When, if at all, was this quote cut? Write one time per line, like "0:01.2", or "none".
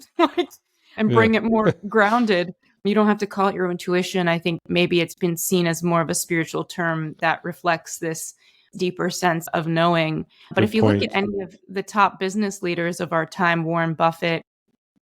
0:08.7

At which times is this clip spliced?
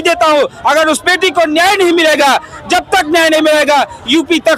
none

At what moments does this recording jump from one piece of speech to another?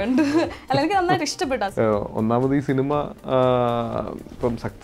0:01.7

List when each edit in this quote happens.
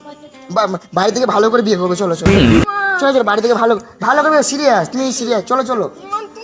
none

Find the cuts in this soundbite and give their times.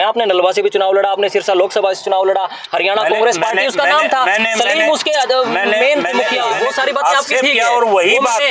0:06.6

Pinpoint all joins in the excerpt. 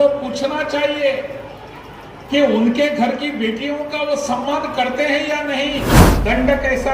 0:06.0

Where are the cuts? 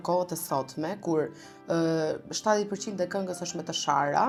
none

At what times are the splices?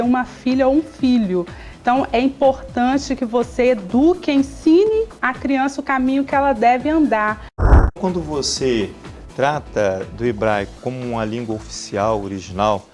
0:07.9

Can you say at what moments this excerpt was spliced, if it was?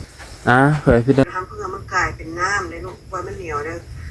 0:01.2

